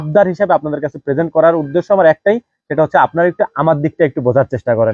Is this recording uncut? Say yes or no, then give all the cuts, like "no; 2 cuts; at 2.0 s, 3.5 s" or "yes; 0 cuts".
yes; 0 cuts